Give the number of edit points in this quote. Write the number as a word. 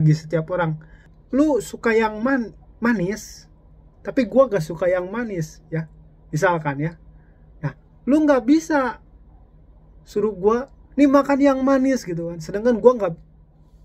one